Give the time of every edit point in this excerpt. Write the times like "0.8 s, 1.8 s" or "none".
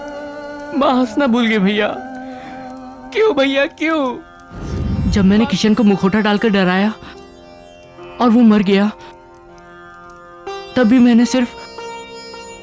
4.8 s